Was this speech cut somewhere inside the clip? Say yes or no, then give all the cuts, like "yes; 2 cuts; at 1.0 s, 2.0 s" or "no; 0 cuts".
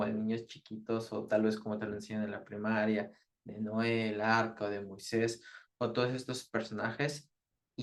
no; 0 cuts